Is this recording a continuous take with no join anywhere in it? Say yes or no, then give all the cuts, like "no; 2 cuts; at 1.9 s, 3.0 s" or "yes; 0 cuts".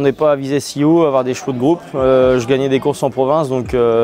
yes; 0 cuts